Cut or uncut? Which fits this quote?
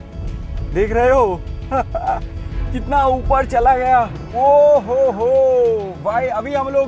cut